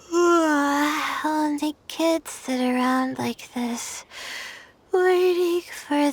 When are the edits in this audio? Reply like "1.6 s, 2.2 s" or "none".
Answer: none